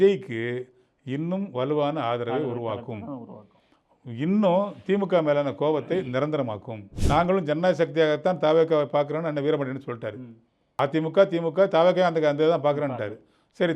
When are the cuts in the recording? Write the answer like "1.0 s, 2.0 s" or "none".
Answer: 6.9 s